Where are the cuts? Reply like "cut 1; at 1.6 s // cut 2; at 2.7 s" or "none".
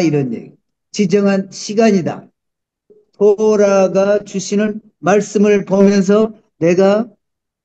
cut 1; at 2.7 s